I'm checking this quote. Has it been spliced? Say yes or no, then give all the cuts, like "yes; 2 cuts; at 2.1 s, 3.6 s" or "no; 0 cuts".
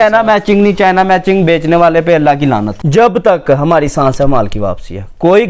yes; 1 cut; at 2.7 s